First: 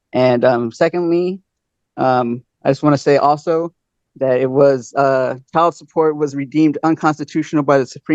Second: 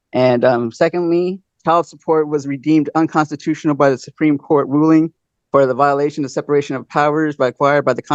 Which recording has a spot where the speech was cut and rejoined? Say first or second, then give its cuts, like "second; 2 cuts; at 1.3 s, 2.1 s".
second; 1 cut; at 1.5 s